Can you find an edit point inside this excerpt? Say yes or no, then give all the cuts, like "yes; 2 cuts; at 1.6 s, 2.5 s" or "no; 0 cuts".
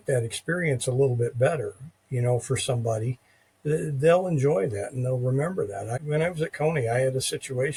no; 0 cuts